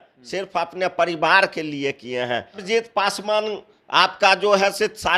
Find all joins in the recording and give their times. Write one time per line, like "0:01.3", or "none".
0:02.6